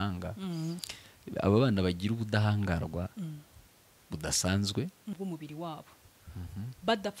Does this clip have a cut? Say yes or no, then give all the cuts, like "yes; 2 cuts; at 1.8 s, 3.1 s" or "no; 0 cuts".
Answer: yes; 1 cut; at 5.1 s